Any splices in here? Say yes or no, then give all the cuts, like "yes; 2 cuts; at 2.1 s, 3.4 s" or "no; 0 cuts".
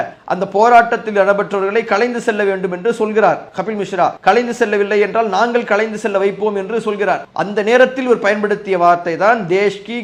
no; 0 cuts